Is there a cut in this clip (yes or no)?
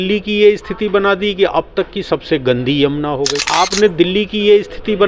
no